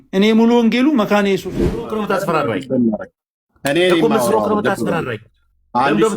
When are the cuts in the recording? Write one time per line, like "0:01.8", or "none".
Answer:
0:02.0